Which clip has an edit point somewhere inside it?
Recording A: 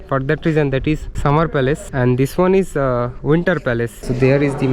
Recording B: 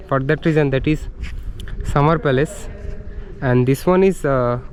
A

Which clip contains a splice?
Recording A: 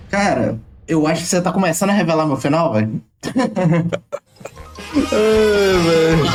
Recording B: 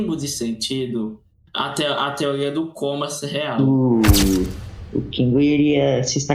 B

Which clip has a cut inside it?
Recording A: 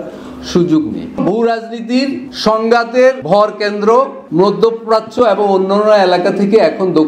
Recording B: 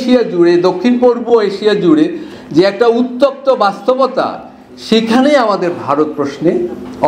A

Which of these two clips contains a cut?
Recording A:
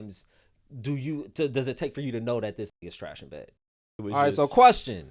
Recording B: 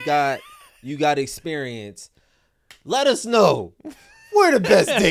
A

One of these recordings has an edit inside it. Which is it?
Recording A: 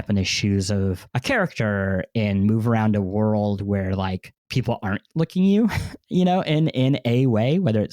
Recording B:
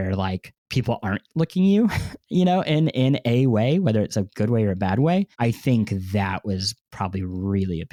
A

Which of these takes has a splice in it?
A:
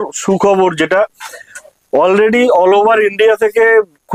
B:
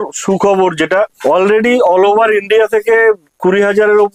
B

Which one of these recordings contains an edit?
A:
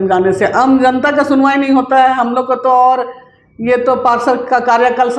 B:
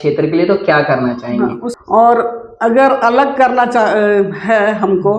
B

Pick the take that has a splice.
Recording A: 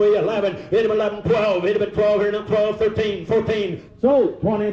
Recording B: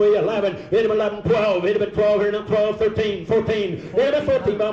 A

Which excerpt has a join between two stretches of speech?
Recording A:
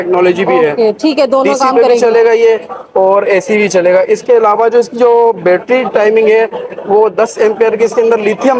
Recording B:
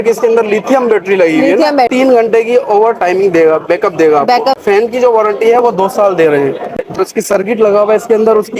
B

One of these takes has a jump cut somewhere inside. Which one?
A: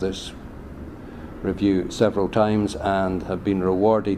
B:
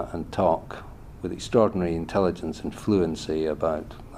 B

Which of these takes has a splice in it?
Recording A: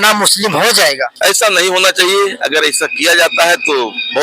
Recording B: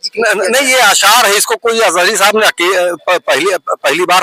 A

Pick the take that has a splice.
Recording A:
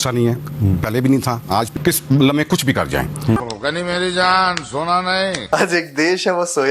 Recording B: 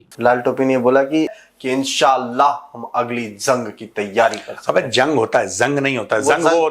A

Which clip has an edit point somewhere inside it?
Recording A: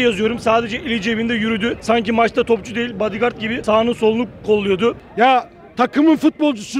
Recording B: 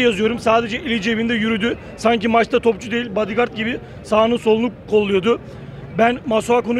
A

